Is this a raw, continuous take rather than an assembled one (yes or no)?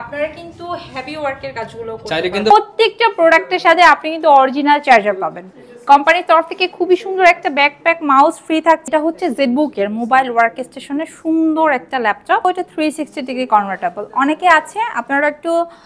no